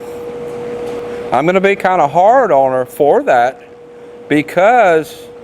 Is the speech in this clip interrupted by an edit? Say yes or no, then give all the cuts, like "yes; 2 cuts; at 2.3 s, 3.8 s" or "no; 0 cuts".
yes; 1 cut; at 1.0 s